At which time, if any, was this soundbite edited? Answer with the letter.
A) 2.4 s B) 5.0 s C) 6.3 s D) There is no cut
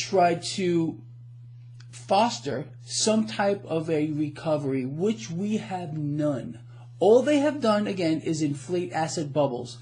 D